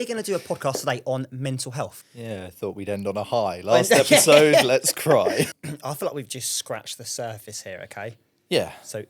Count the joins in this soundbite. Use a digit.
2